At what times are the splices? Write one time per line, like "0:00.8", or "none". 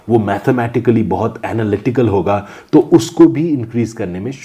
none